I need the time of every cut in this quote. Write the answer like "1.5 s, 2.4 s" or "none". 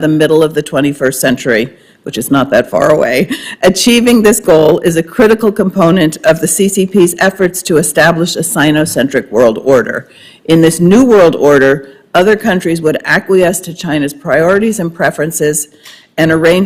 none